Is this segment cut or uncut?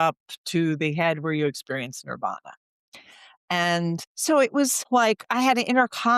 cut